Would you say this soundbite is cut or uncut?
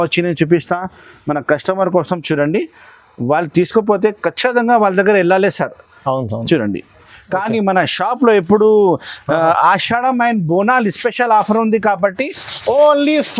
cut